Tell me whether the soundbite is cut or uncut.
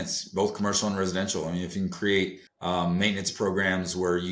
cut